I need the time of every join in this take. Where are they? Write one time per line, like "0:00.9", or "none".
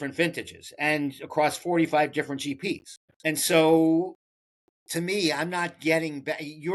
0:03.1